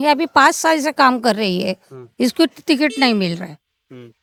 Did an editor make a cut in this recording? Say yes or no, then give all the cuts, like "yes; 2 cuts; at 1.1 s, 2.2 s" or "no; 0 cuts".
no; 0 cuts